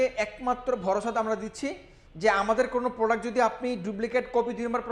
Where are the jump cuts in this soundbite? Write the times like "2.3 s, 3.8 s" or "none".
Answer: none